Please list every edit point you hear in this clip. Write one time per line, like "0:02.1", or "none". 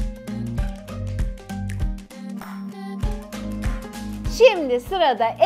0:02.2
0:04.4